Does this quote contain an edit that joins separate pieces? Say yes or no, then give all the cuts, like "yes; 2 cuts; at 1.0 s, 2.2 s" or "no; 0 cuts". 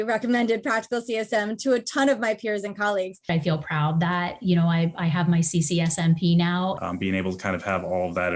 yes; 2 cuts; at 3.3 s, 6.8 s